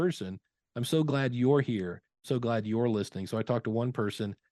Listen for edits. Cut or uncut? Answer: cut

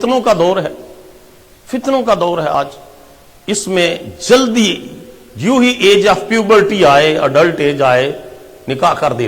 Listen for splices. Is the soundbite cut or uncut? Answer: cut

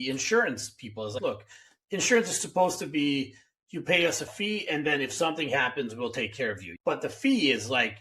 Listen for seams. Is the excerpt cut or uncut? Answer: cut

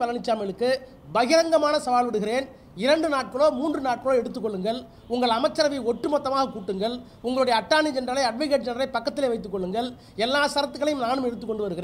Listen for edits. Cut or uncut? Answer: uncut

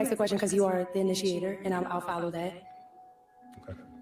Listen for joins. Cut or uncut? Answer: uncut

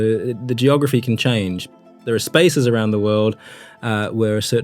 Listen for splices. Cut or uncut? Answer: cut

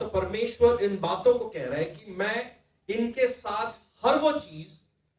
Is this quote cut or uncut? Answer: uncut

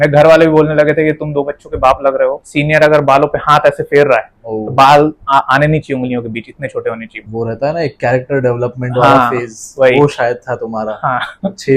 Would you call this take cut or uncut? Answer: cut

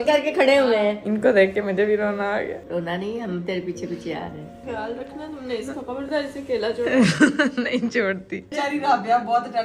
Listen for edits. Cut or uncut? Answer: cut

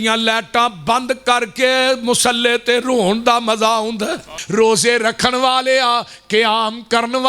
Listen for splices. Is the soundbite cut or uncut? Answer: cut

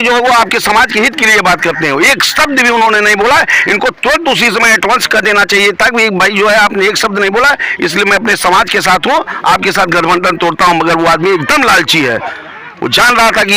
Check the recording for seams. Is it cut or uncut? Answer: uncut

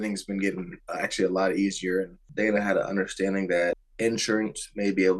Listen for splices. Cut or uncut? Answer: cut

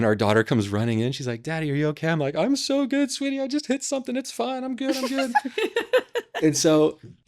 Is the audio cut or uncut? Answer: uncut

